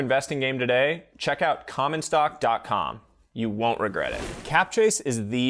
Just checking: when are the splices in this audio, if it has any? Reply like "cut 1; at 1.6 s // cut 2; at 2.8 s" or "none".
cut 1; at 4.4 s

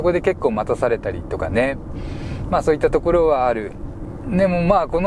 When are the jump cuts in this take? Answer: none

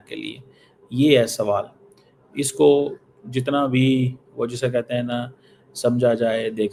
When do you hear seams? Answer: none

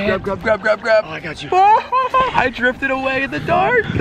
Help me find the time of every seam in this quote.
none

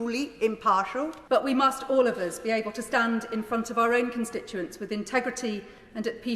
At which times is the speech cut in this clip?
cut 1; at 1.2 s

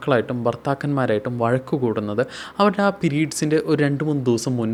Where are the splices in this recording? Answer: none

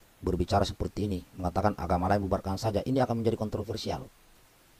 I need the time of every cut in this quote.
none

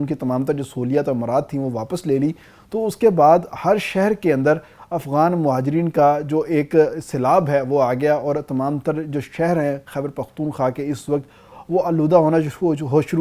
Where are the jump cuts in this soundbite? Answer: none

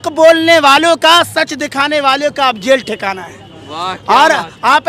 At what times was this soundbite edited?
none

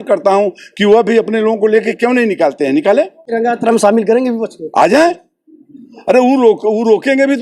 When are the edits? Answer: cut 1; at 3.3 s

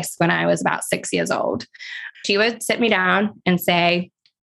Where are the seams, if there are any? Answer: cut 1; at 2.2 s

